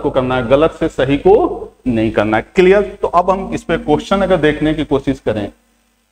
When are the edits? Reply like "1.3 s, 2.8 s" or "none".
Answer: none